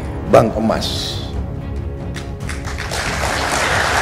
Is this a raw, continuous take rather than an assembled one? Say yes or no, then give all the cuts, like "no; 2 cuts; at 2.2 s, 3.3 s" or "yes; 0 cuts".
yes; 0 cuts